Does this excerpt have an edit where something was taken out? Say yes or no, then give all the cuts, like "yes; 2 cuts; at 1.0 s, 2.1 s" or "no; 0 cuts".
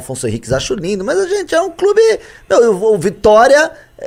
no; 0 cuts